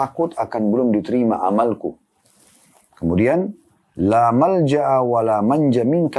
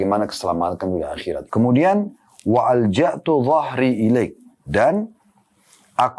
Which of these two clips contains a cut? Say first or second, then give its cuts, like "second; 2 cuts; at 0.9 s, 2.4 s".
second; 1 cut; at 1.4 s